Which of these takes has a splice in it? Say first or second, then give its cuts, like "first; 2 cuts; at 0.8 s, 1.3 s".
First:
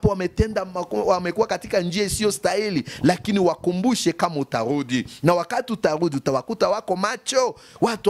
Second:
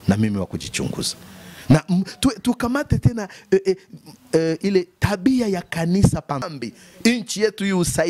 second; 1 cut; at 6.4 s